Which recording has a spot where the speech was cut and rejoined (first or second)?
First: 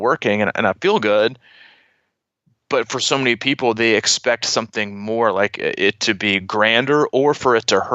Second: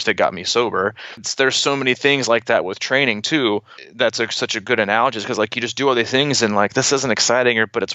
second